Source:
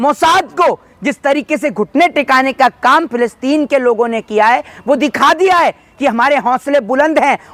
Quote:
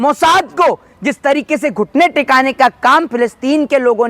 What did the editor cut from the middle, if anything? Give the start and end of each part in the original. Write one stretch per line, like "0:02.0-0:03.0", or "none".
none